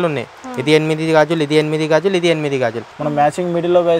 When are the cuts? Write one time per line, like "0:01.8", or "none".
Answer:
0:02.9